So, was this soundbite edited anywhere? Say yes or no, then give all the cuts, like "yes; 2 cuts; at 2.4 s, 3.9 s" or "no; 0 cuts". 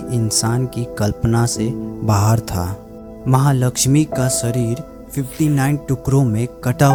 no; 0 cuts